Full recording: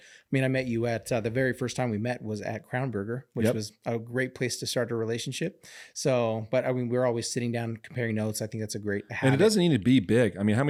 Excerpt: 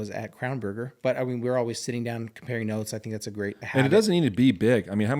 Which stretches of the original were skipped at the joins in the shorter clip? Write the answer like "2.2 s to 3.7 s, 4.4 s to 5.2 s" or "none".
3.3 s to 6.4 s